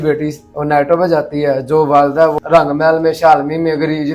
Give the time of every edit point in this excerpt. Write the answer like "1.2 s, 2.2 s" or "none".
2.3 s